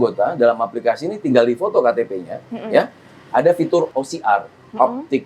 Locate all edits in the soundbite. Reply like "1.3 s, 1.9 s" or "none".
3.9 s